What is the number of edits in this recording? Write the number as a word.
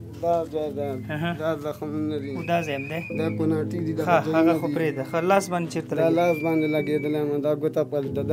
zero